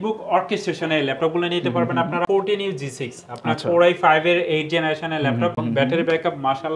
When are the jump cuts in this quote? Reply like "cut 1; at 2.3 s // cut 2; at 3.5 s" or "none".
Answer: cut 1; at 2.2 s // cut 2; at 5.6 s